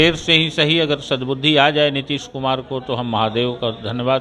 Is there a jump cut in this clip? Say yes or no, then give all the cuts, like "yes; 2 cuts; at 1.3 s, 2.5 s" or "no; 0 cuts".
no; 0 cuts